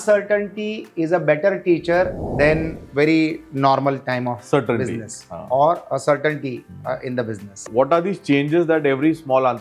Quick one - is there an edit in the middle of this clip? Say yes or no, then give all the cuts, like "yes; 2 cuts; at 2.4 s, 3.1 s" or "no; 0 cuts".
yes; 2 cuts; at 2.8 s, 7.7 s